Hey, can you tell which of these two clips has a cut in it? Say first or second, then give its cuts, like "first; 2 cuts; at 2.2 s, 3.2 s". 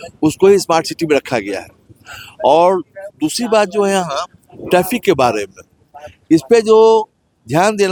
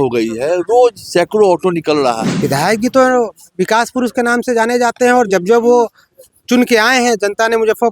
second; 1 cut; at 2.3 s